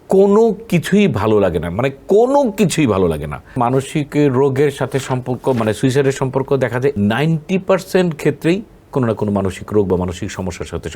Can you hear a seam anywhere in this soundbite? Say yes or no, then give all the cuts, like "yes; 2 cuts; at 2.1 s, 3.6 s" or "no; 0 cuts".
yes; 2 cuts; at 3.6 s, 6.9 s